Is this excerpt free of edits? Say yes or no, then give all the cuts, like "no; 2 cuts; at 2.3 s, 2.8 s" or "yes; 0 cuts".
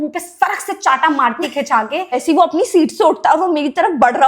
no; 1 cut; at 2.2 s